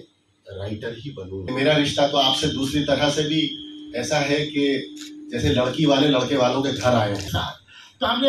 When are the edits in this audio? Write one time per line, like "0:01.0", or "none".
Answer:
0:01.5
0:07.3